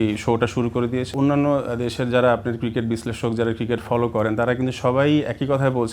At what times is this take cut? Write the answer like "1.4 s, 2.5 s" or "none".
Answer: 1.1 s